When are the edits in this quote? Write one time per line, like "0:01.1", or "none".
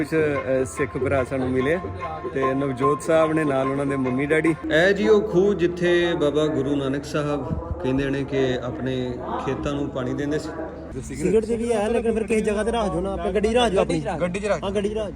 0:04.6
0:11.0

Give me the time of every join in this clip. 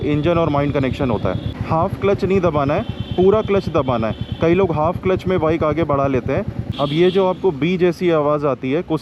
0:01.6
0:06.6

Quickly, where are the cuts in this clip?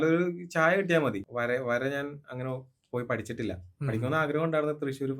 0:01.2

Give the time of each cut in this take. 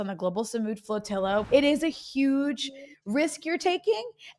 0:01.5

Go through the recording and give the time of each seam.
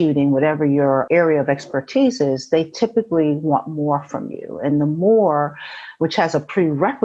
0:01.0

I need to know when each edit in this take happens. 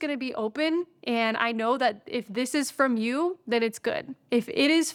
none

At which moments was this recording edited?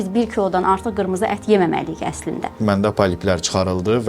0:02.6

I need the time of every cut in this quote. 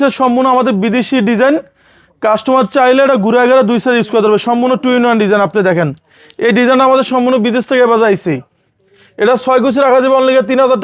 none

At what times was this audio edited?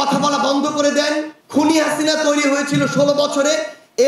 0:01.4

